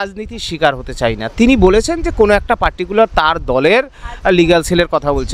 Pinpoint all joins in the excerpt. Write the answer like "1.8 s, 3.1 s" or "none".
none